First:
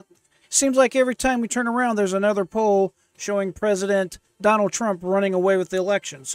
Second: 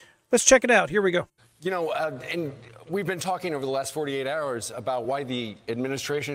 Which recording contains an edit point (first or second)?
second